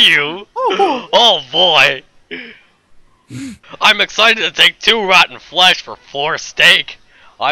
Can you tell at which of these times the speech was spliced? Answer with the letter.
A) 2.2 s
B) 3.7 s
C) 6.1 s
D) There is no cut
B